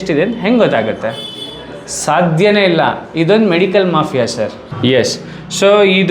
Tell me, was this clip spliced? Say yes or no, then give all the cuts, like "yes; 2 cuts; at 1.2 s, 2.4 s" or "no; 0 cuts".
yes; 1 cut; at 4.7 s